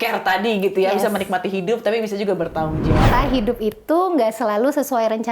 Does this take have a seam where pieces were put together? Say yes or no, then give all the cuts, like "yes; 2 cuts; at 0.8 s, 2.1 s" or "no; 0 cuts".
yes; 1 cut; at 3.0 s